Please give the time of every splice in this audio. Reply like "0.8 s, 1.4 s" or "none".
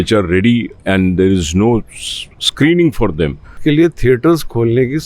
3.6 s